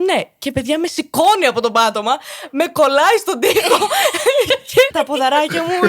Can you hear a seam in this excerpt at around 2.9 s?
no; 1 cut; at 4.9 s

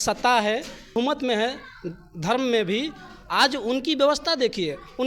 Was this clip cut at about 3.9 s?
no; 1 cut; at 1.0 s

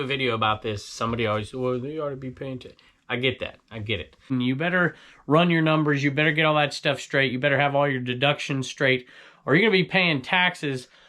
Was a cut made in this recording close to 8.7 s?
no; 1 cut; at 4.3 s

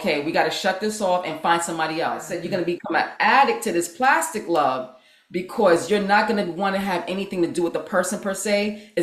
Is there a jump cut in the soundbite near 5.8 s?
no; 1 cut; at 2.3 s

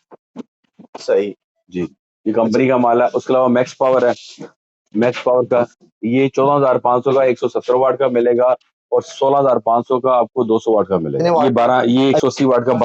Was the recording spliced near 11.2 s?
yes; 1 cut; at 11.2 s

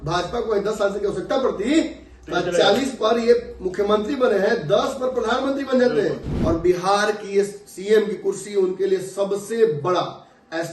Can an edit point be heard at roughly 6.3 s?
yes; 1 cut; at 6.3 s

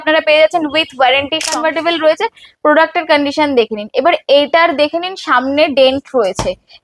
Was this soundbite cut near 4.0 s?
no; 1 cut; at 1.5 s

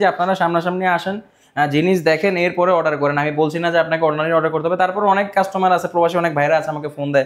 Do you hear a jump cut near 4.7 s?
no; 0 cuts

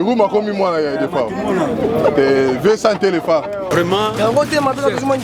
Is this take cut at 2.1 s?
no; 1 cut; at 3.7 s

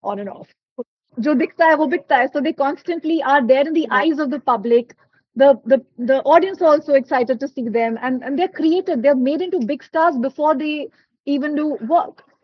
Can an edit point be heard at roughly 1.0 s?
yes; 1 cut; at 1.0 s

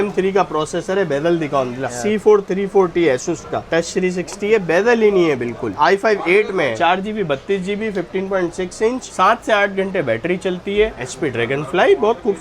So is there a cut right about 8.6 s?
no; 5 cuts; at 1.9 s, 3.6 s, 5.7 s, 6.8 s, 10.9 s

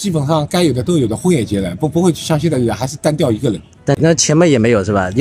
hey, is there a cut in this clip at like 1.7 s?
no; 0 cuts

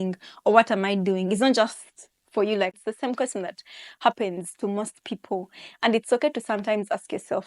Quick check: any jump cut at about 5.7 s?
no; 1 cut; at 2.7 s

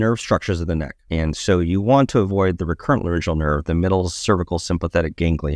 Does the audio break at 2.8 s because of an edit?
no; 1 cut; at 1.0 s

